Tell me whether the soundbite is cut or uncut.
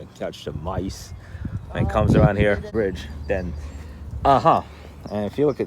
cut